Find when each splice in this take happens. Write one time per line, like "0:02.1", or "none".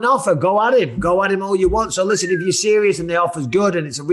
none

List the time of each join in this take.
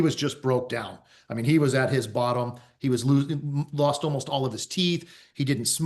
none

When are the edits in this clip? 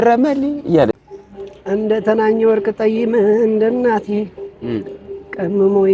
0:00.9

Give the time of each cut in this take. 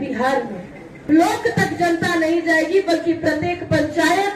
0:00.9

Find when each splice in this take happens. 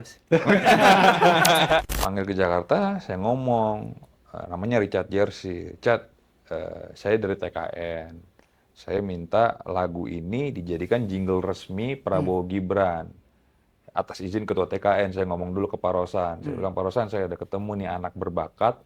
0:01.9

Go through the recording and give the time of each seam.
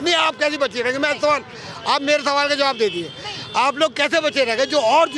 none

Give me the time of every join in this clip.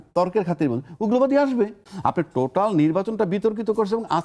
0:01.8

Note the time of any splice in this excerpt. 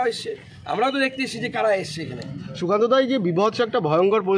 none

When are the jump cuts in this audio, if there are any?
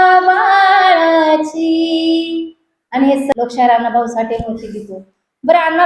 0:03.3

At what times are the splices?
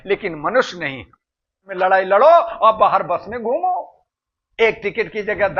0:01.7

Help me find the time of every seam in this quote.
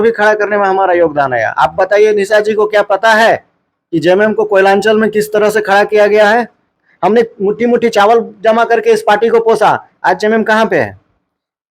0:06.6

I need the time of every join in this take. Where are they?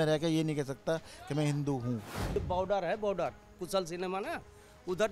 0:02.2

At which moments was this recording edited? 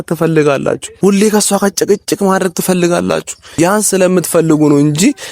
0:00.9
0:03.4

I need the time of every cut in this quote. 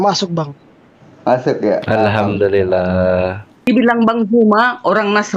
0:03.7

